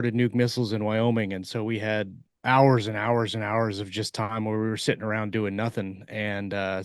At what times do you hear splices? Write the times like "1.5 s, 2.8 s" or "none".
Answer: 2.2 s